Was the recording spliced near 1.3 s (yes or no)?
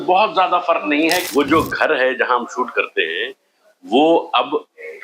yes